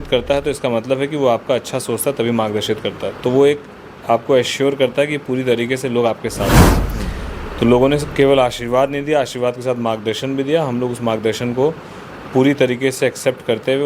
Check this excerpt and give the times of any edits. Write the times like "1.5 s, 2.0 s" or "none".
none